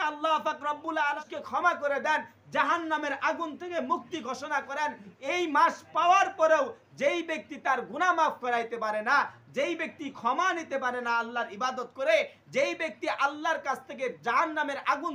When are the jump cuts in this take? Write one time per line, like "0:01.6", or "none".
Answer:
0:01.2